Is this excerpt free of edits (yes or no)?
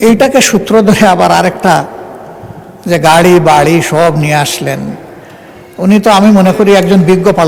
yes